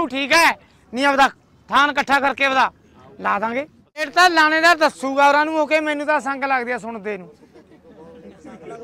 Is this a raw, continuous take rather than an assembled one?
no; 1 cut; at 4.1 s

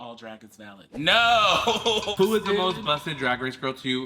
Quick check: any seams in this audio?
yes; 1 cut; at 2.1 s

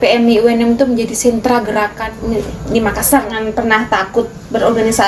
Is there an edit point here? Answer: yes; 2 cuts; at 2.1 s, 3.3 s

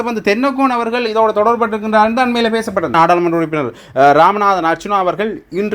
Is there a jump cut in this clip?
yes; 1 cut; at 2.9 s

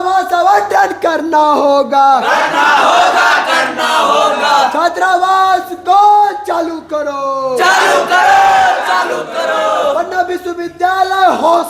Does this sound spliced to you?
no; 0 cuts

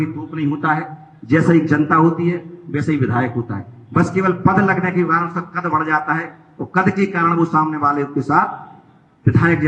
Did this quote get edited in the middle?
no; 0 cuts

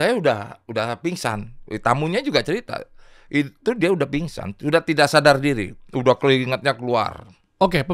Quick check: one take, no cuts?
yes; 0 cuts

